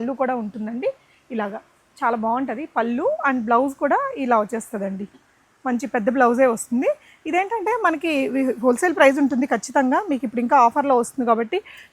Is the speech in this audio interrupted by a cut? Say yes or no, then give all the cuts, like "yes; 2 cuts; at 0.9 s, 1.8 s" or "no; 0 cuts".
no; 0 cuts